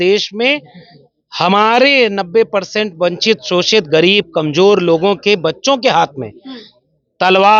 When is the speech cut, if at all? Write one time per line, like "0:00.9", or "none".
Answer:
none

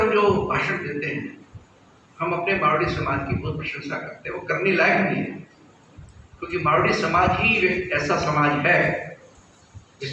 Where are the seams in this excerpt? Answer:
none

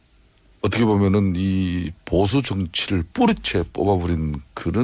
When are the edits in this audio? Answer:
0:01.8

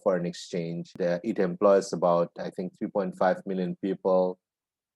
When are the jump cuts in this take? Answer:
0:00.9

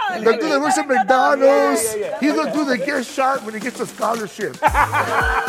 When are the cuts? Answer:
0:02.1

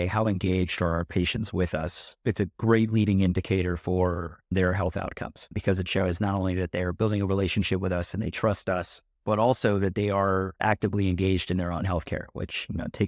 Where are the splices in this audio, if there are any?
none

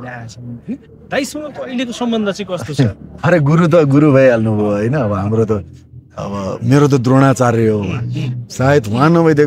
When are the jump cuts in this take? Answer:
none

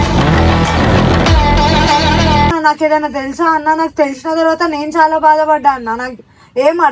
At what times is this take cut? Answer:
0:02.5

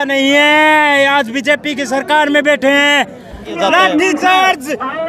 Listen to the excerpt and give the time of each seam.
0:03.5

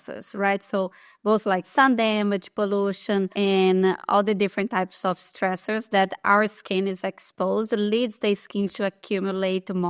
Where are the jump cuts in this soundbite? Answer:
none

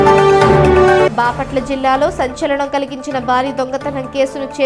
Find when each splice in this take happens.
none

